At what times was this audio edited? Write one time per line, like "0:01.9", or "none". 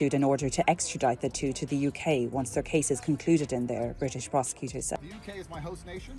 0:05.0